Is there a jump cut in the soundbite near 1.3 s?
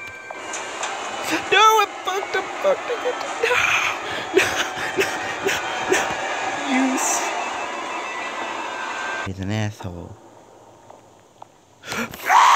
no; 1 cut; at 9.3 s

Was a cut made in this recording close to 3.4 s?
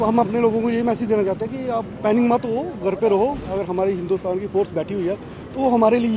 yes; 1 cut; at 3.4 s

